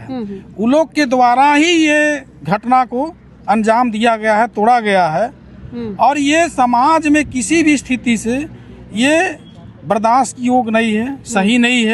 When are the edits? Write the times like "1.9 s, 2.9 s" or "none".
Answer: none